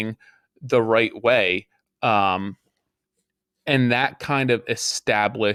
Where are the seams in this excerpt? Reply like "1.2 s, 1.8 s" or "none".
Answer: none